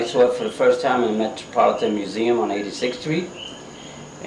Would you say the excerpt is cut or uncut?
uncut